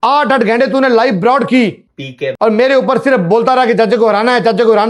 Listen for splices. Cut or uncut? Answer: uncut